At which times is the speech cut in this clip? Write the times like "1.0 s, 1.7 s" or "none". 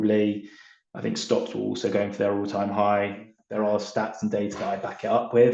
3.4 s